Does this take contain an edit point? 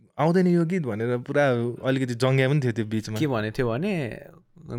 no; 0 cuts

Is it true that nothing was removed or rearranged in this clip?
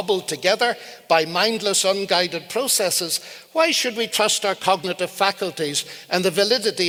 yes; 0 cuts

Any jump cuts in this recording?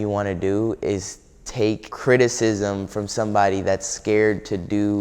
yes; 1 cut; at 1.9 s

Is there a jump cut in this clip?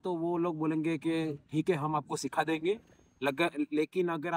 no; 0 cuts

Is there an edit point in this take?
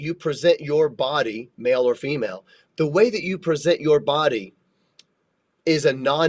no; 0 cuts

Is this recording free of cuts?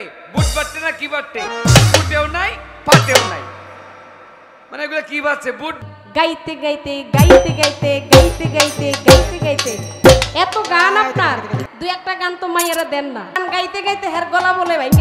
no; 3 cuts; at 5.8 s, 11.7 s, 13.4 s

